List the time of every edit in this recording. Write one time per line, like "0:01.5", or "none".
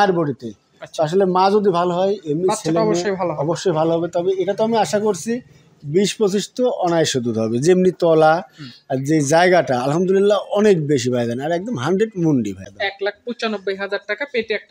0:12.6